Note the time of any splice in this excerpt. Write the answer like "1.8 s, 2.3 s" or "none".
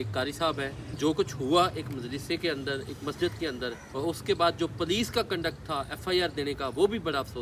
1.0 s, 3.8 s